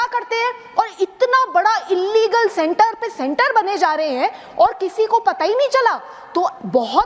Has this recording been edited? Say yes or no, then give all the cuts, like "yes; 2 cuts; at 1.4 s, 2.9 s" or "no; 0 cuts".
no; 0 cuts